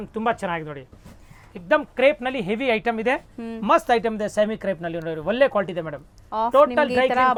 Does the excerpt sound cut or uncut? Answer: uncut